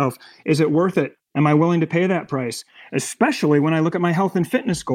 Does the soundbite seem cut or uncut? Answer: cut